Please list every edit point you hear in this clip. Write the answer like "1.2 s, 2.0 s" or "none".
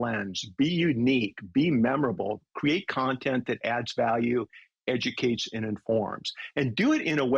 none